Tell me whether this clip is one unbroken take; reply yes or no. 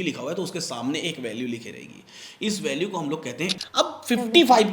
no